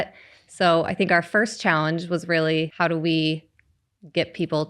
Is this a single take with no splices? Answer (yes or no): no